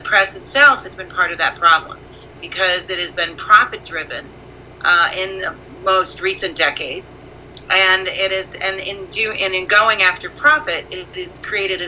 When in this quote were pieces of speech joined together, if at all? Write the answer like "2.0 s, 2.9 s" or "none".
none